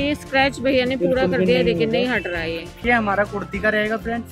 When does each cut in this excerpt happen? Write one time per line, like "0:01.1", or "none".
0:02.8